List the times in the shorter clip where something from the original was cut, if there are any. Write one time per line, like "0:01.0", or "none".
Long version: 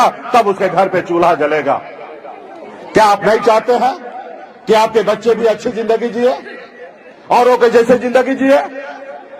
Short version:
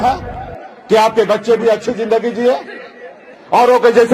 none